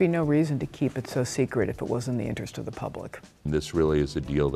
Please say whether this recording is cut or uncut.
cut